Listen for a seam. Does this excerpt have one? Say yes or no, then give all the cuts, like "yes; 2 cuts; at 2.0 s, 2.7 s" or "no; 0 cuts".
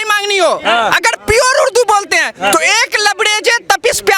no; 0 cuts